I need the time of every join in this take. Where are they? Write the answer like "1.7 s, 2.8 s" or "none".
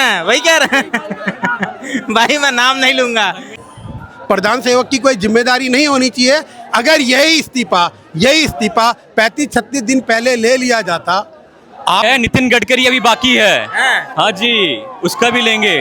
3.6 s, 12.0 s